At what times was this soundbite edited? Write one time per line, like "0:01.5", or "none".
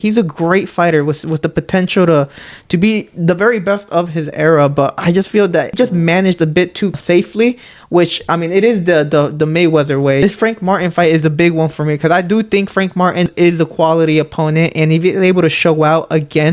0:05.7
0:07.0
0:10.2
0:13.3